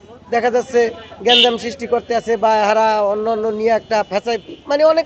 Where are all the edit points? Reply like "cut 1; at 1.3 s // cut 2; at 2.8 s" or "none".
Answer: none